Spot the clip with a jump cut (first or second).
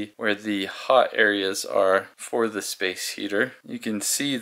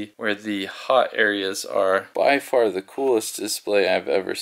second